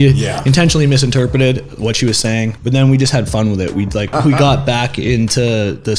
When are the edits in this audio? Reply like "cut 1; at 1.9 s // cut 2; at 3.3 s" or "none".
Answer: cut 1; at 2.5 s // cut 2; at 4.1 s